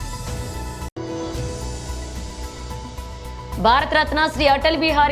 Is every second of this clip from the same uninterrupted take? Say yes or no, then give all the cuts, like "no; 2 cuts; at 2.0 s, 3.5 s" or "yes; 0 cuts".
no; 2 cuts; at 0.9 s, 2.8 s